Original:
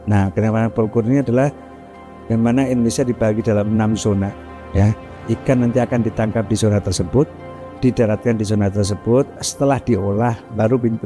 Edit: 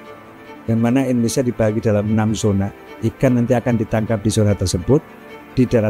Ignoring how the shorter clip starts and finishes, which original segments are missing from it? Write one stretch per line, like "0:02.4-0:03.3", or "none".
0:04.5-0:05.1